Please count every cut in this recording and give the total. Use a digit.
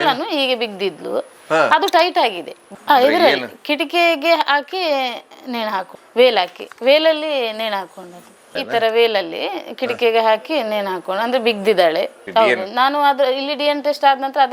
2